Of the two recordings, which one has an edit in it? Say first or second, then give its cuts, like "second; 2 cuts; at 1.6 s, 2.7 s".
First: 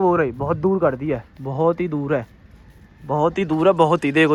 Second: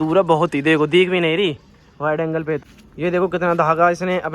second; 1 cut; at 2.7 s